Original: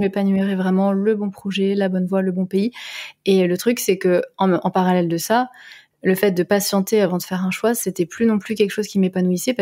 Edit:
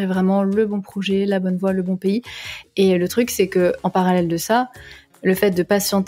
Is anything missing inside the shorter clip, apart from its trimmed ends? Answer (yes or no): yes